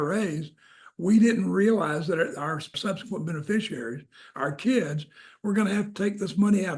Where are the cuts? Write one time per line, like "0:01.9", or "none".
0:02.7